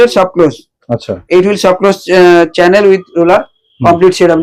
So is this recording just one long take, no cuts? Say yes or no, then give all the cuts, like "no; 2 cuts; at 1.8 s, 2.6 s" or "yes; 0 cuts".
yes; 0 cuts